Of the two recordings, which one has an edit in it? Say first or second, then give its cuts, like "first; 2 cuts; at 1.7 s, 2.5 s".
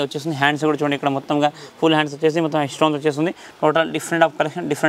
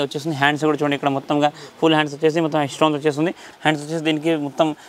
second; 1 cut; at 3.5 s